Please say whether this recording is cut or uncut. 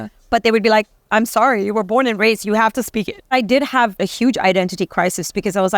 cut